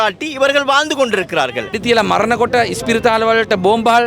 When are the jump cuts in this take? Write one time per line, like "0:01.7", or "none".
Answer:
0:01.7

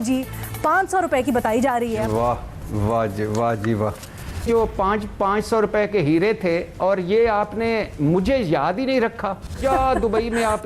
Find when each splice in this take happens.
0:02.0
0:04.4
0:09.6

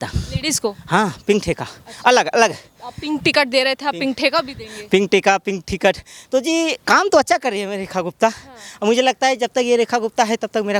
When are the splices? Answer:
none

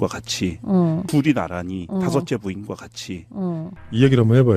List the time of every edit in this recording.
0:01.1
0:03.7

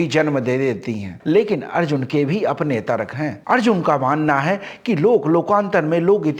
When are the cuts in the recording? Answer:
0:01.1

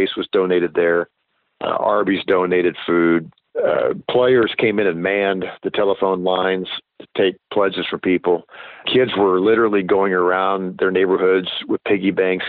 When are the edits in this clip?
0:03.4
0:08.9

